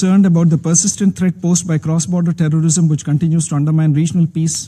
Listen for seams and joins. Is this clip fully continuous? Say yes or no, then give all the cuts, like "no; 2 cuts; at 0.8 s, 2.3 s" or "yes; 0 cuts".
yes; 0 cuts